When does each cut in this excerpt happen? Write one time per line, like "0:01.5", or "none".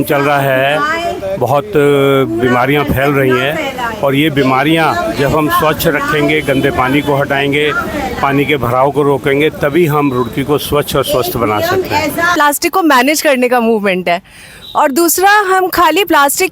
0:12.3